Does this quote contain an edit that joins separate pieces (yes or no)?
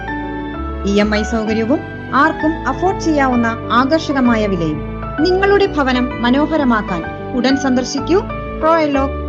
no